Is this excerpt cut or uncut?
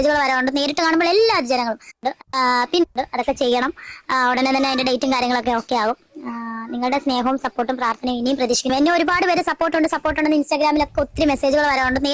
uncut